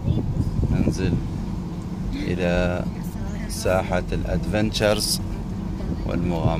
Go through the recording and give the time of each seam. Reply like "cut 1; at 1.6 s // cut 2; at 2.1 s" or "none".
none